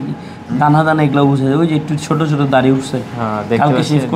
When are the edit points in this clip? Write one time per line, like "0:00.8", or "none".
none